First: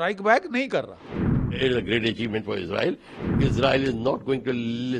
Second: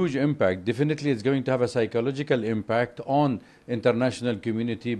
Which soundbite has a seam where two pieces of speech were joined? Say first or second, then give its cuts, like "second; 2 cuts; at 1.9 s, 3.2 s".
first; 2 cuts; at 1.5 s, 3.2 s